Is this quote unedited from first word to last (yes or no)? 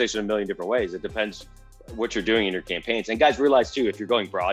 yes